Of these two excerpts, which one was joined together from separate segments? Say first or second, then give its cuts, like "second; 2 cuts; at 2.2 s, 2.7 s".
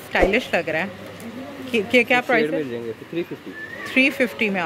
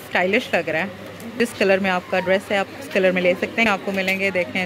second; 2 cuts; at 1.3 s, 3.7 s